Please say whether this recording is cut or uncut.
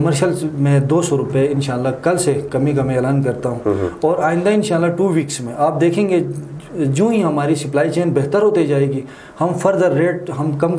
uncut